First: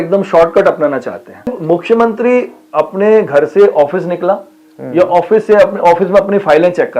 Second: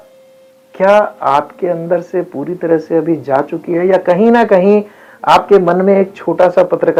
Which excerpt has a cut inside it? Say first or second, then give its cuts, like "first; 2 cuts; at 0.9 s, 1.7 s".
first; 1 cut; at 1.5 s